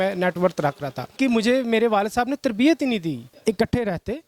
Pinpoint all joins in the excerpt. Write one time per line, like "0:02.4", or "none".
0:01.1
0:03.3